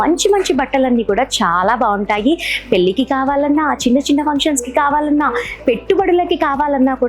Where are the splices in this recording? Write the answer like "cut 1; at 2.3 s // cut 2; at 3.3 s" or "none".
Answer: none